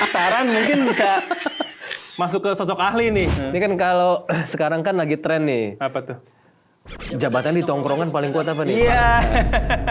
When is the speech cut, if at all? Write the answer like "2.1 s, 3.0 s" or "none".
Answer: 3.4 s